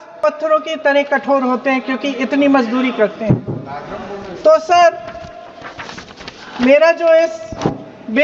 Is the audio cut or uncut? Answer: uncut